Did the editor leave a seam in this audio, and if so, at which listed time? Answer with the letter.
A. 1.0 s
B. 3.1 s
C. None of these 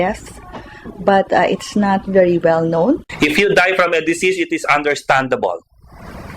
B